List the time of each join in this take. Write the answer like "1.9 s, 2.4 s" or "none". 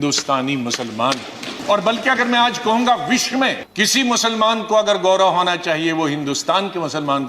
1.5 s, 3.6 s